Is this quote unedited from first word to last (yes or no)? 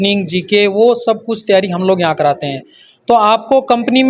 yes